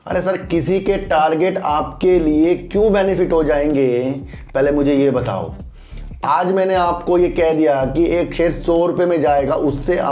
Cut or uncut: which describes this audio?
uncut